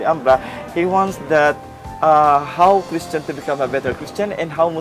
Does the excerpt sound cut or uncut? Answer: uncut